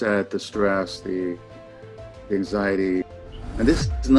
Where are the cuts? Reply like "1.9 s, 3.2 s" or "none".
3.1 s